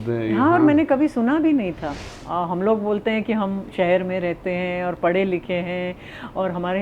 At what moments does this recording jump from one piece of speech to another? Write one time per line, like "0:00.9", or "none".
0:02.1